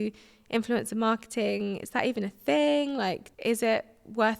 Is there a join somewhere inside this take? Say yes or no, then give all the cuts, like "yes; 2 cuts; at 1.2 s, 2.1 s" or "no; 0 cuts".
yes; 1 cut; at 3.3 s